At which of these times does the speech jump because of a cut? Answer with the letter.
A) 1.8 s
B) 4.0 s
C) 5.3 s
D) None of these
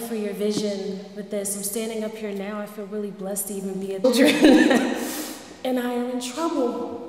D